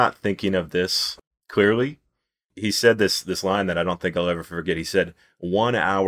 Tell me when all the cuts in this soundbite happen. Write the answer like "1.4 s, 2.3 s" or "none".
1.1 s, 2.5 s